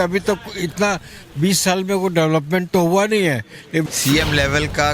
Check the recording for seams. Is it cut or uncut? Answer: cut